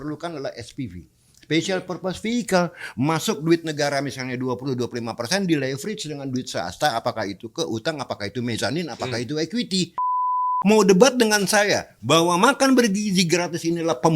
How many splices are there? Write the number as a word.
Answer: one